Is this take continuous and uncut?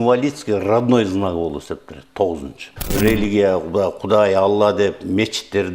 no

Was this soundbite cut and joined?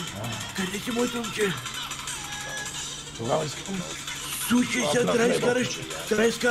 no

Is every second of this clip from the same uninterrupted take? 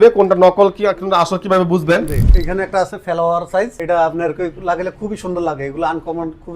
no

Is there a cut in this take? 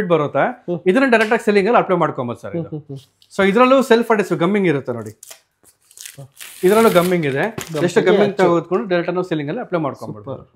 no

